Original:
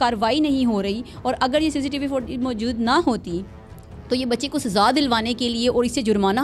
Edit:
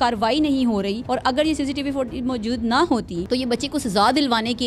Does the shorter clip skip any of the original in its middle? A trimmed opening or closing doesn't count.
yes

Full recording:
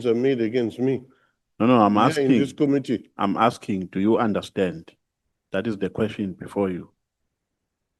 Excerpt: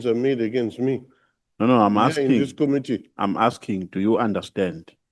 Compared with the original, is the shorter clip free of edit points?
yes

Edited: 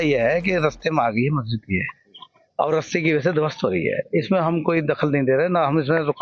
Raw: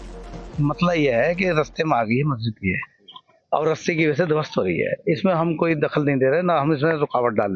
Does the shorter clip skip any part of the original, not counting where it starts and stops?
no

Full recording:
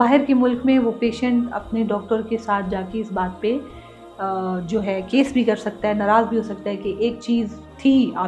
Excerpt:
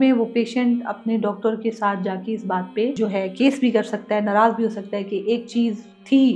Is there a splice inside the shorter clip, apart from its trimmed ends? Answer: yes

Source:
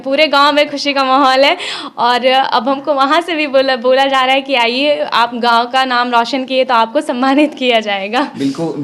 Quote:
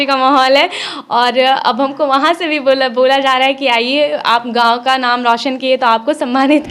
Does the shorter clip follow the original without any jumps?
yes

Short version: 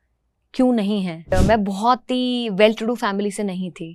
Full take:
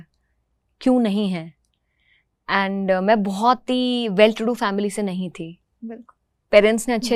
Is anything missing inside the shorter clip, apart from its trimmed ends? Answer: yes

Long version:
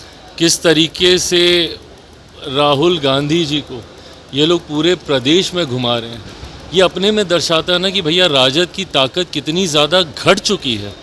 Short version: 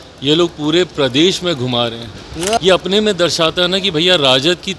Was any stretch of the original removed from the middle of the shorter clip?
no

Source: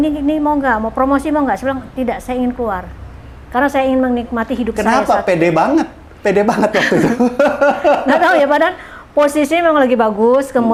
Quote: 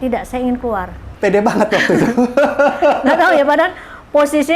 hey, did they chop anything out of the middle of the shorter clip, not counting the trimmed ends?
yes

